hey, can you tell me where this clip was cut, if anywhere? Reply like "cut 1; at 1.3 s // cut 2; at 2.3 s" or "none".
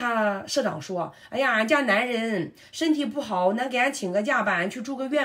none